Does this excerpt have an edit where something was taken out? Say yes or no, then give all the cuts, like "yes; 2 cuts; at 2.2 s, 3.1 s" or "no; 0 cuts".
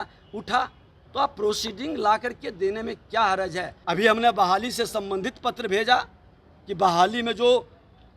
yes; 1 cut; at 3.7 s